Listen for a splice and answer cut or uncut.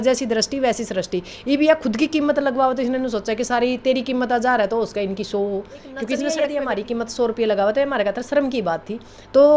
cut